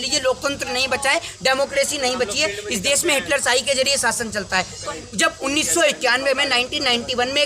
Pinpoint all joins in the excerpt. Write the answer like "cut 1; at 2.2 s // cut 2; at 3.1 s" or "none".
cut 1; at 4.8 s